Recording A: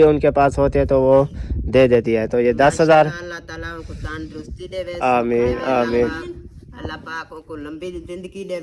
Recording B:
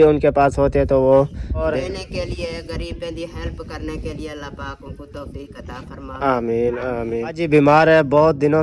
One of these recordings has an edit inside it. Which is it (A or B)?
B